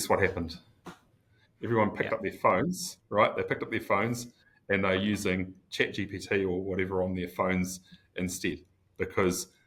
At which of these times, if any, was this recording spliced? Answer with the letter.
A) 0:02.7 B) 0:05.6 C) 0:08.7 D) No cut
D